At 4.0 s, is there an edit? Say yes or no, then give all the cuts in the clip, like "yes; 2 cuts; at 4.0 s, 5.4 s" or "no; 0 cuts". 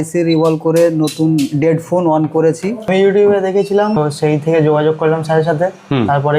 yes; 2 cuts; at 2.8 s, 4.0 s